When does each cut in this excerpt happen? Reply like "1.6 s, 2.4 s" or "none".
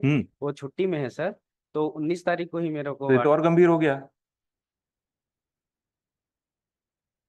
none